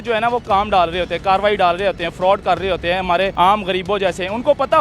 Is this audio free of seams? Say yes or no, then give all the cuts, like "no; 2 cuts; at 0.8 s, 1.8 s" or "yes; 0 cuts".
no; 1 cut; at 3.3 s